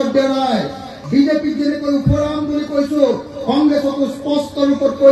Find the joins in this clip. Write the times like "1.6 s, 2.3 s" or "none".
1.0 s